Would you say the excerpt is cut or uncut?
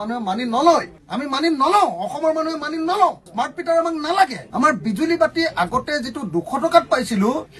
uncut